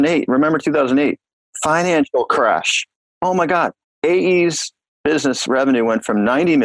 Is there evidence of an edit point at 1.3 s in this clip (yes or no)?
no